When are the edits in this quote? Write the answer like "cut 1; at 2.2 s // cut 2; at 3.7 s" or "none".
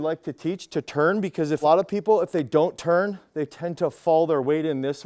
cut 1; at 1.6 s